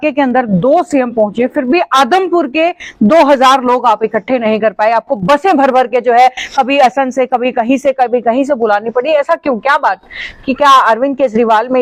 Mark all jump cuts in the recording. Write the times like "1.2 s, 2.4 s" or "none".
none